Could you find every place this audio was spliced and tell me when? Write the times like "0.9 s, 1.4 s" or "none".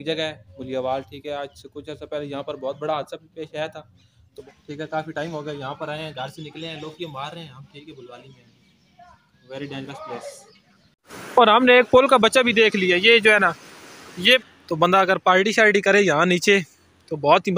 4.3 s, 11.1 s, 14.4 s